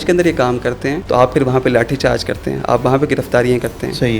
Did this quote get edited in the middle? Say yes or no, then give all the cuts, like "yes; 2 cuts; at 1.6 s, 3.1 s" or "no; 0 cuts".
yes; 1 cut; at 1.0 s